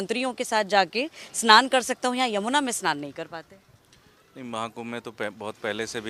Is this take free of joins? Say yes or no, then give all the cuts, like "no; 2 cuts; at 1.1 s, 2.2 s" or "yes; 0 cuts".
yes; 0 cuts